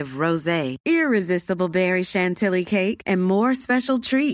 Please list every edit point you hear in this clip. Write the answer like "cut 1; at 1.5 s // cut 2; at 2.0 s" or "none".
none